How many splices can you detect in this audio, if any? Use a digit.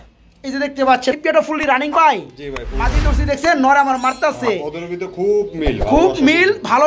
1